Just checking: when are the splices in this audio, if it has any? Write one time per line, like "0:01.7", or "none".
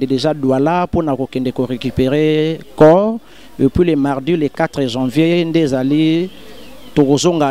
none